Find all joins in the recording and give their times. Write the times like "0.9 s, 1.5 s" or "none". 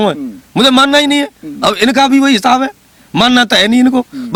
none

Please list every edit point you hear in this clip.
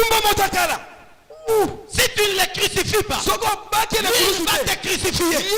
none

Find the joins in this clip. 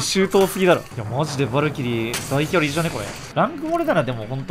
0.9 s, 3.2 s

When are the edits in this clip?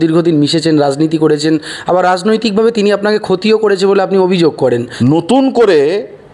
4.9 s

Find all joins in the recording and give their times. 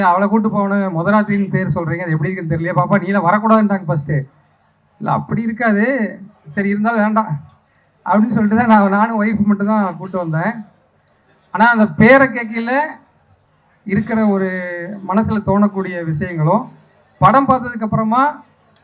none

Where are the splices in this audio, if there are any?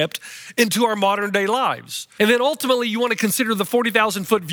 2.0 s

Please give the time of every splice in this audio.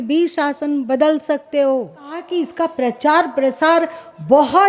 2.3 s

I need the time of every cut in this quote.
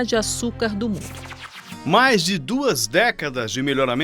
1.5 s

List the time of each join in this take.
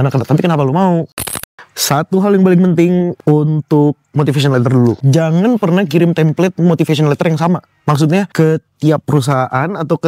1.3 s, 3.2 s, 5.0 s, 8.3 s

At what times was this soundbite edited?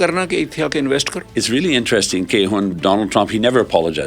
1.2 s

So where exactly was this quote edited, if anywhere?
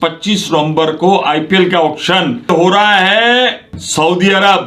2.5 s, 3.7 s

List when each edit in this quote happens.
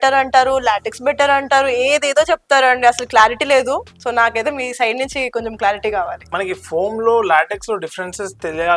6.3 s

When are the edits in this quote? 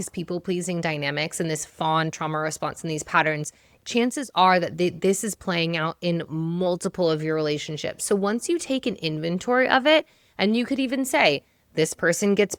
none

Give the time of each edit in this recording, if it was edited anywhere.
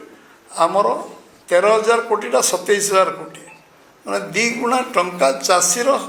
none

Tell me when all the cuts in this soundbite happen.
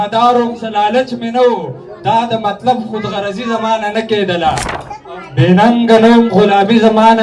5.0 s

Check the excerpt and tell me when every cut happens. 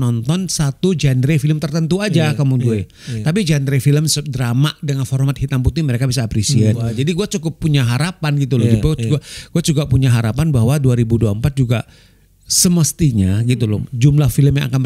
6.9 s

